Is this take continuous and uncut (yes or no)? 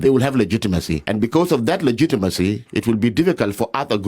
no